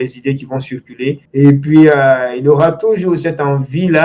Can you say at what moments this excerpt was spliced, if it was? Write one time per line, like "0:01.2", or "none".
0:01.2